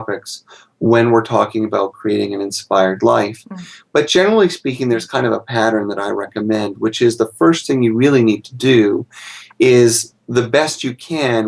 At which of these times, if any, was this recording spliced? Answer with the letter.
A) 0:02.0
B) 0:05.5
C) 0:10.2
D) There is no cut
A